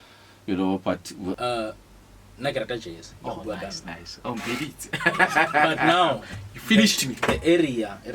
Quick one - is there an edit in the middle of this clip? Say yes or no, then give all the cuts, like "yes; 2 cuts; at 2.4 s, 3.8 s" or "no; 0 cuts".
yes; 1 cut; at 1.4 s